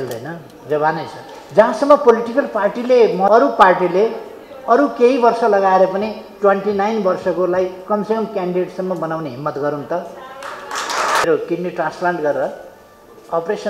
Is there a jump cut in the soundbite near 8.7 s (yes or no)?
no